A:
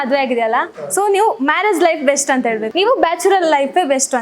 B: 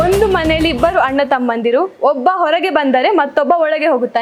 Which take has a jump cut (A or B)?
A